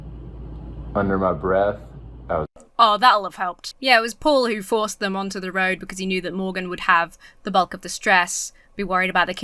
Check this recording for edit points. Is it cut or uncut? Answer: uncut